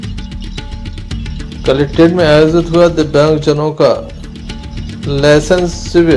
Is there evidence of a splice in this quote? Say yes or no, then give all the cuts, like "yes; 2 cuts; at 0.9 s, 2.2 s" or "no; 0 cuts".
yes; 1 cut; at 0.9 s